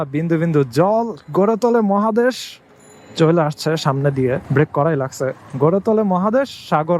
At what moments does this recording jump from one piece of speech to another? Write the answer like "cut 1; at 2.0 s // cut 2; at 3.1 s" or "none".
cut 1; at 4.4 s